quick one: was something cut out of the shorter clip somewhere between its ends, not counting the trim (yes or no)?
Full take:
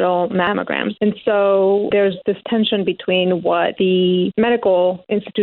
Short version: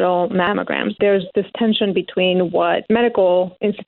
yes